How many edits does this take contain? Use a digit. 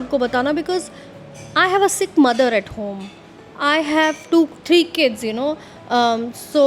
1